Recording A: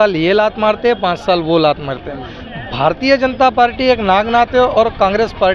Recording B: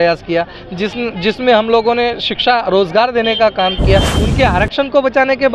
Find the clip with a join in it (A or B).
B